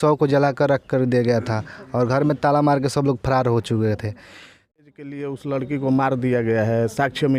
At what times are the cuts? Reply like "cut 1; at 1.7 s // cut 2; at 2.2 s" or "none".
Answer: cut 1; at 4.8 s